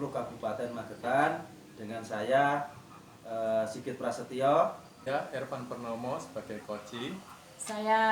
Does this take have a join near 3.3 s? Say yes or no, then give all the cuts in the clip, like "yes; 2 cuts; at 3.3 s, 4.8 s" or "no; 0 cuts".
no; 1 cut; at 5.0 s